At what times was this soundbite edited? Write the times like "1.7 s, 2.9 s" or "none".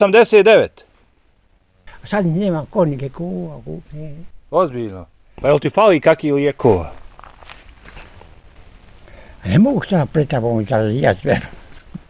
1.9 s

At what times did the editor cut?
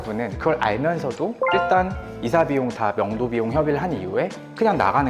none

